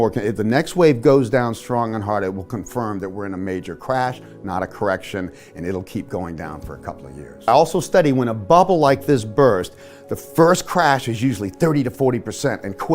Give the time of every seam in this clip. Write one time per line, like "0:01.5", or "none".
0:07.5